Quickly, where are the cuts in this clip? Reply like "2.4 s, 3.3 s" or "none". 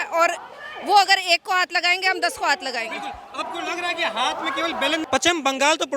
none